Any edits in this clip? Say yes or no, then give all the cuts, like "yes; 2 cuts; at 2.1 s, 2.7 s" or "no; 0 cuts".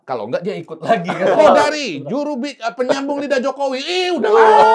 yes; 1 cut; at 1.3 s